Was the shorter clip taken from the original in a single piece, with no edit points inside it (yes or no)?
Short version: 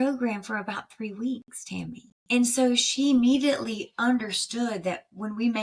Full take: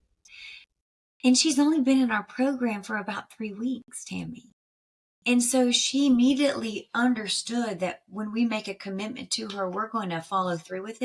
no